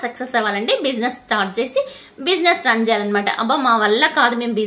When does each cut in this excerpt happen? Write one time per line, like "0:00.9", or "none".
none